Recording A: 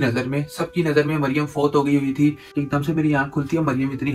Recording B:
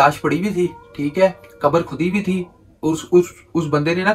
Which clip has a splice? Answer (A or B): A